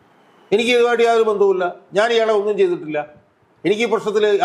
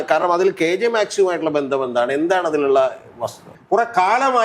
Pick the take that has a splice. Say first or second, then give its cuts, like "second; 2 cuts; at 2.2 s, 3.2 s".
second; 1 cut; at 3.5 s